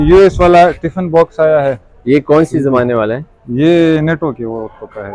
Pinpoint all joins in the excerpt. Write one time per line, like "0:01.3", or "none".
none

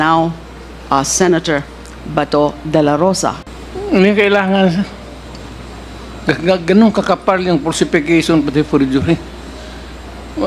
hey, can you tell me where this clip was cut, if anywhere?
0:03.5

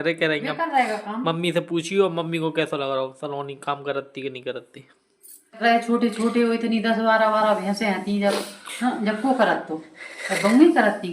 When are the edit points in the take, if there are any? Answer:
0:05.6

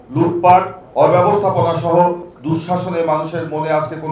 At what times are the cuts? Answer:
none

